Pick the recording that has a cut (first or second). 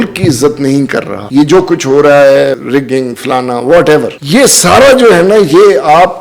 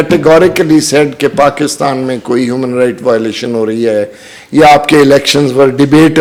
first